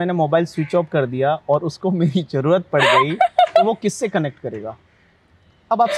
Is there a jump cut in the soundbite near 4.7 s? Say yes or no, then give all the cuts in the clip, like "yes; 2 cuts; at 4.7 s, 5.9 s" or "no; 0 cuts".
no; 0 cuts